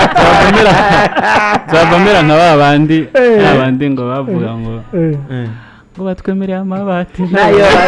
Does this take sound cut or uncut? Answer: uncut